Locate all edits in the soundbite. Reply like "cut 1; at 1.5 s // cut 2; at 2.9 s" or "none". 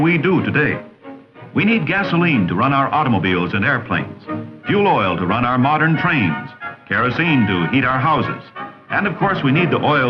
cut 1; at 4.3 s